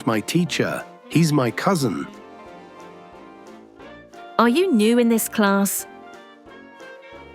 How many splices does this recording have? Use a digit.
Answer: 1